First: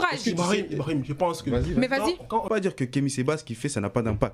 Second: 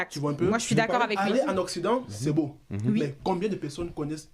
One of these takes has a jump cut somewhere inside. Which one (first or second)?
first